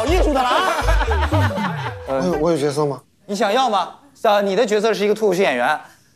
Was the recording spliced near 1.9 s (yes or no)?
yes